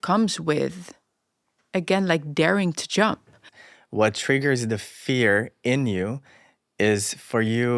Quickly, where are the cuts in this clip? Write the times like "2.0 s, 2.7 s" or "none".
3.5 s

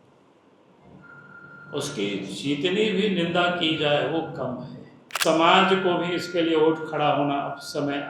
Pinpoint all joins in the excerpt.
5.2 s

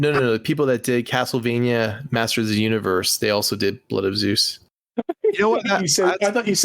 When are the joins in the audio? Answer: none

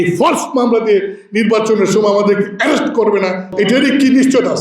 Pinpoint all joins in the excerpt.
3.4 s

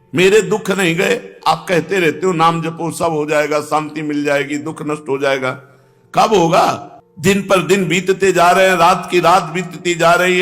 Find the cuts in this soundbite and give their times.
none

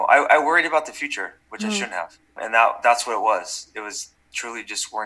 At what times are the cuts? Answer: 2.4 s

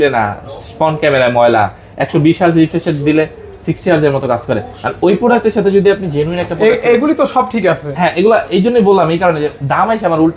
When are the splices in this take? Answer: none

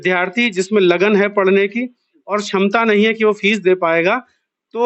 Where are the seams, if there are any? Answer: none

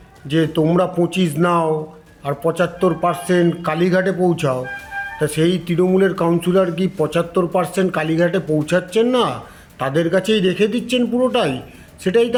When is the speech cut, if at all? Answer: none

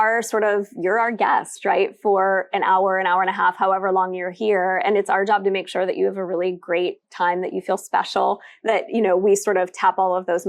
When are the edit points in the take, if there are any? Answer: none

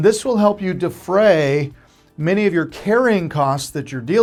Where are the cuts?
none

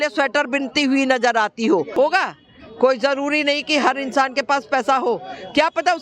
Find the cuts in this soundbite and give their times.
1.9 s

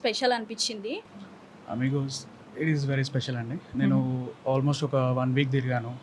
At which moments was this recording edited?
1.1 s

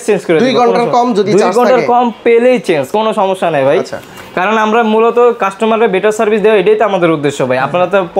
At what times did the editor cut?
none

